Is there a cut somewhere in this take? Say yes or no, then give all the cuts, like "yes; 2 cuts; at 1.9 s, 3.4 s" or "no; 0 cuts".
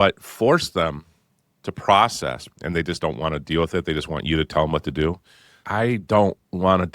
yes; 2 cuts; at 2.5 s, 5.6 s